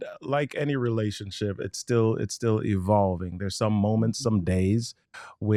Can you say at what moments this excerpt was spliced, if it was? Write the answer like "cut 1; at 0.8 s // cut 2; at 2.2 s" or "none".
none